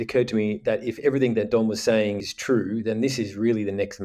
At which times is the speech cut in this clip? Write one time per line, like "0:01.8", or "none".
0:02.3